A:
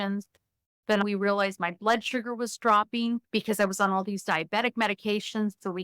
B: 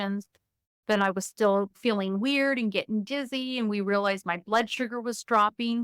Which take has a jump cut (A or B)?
A